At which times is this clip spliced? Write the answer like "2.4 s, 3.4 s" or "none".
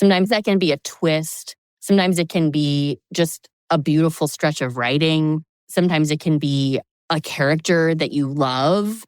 3.5 s, 5.5 s, 7.0 s